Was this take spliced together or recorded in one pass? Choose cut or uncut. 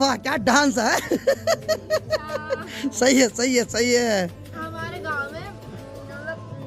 uncut